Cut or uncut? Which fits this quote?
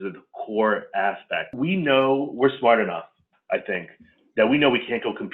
cut